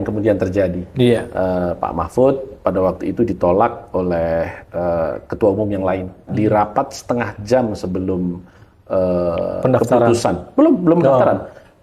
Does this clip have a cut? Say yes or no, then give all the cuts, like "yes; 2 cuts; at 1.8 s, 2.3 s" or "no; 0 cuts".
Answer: yes; 1 cut; at 6.3 s